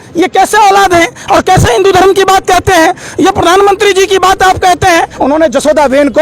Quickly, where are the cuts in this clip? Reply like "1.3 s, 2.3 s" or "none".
5.1 s